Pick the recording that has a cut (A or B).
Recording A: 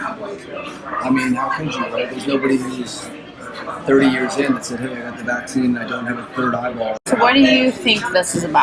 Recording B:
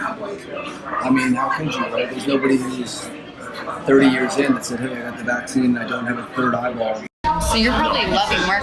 A